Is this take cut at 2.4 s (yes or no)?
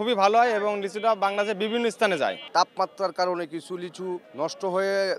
yes